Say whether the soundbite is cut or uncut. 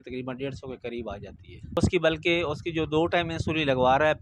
cut